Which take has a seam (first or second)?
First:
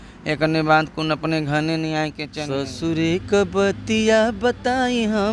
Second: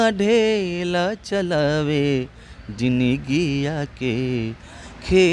first